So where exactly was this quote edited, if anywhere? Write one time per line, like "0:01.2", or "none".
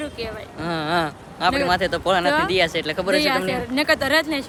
none